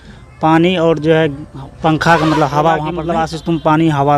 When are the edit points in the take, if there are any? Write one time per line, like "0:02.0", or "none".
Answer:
0:02.9